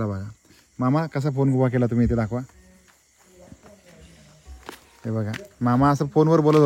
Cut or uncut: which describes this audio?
uncut